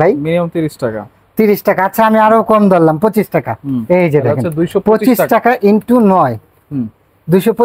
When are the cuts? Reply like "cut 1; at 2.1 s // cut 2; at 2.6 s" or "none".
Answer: cut 1; at 3.7 s